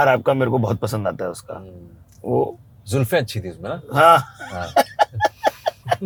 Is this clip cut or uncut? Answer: uncut